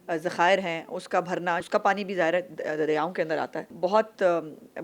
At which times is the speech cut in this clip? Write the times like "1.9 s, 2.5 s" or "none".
1.6 s, 3.7 s